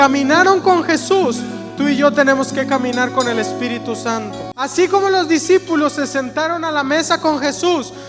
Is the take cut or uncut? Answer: cut